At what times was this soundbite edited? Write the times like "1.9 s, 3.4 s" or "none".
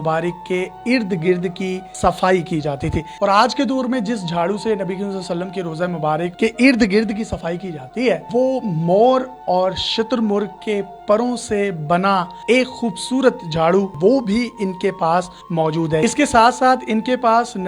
3.1 s, 6.3 s, 8.2 s, 13.9 s, 16.0 s